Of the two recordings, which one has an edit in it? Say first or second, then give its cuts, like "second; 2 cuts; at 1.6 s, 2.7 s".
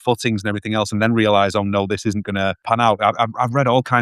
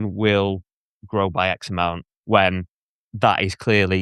first; 1 cut; at 2.6 s